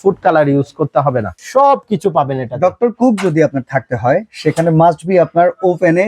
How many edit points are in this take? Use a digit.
1